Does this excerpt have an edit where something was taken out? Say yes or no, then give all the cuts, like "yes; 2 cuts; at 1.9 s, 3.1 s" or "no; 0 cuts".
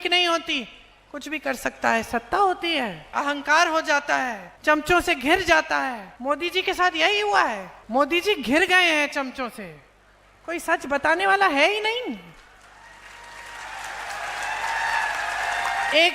yes; 4 cuts; at 3.1 s, 4.5 s, 6.1 s, 7.7 s